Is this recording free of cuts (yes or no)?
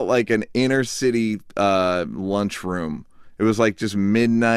yes